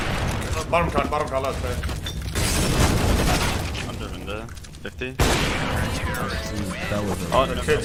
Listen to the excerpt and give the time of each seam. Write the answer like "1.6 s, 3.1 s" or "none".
none